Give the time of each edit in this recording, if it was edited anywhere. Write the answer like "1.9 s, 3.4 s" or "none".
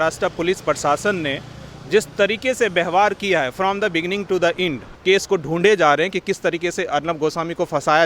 5.0 s